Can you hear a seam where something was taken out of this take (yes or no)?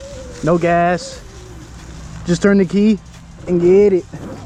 no